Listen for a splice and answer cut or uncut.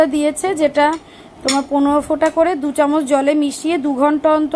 uncut